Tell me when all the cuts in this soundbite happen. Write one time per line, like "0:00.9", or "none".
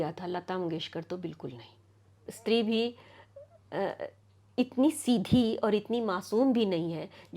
0:02.3